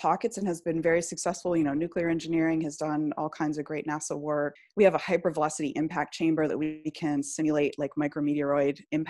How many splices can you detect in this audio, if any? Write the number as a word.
one